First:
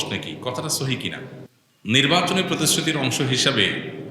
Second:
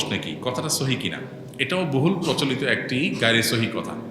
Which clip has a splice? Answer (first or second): first